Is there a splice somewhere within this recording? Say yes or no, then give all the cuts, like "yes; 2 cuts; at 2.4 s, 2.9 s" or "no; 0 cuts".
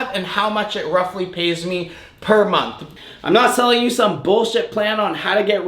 yes; 1 cut; at 2.9 s